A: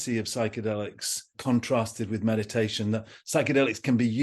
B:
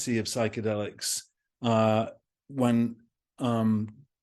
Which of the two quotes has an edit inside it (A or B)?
A